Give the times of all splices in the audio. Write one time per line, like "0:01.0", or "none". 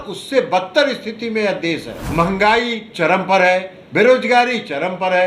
0:02.0